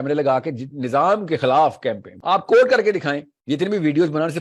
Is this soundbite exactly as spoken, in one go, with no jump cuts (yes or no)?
no